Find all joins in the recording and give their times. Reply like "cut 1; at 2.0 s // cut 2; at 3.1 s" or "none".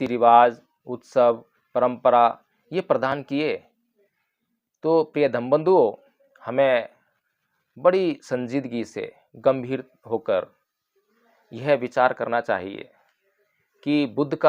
none